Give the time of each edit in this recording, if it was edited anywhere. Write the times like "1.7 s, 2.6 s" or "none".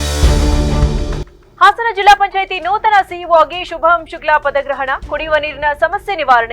1.3 s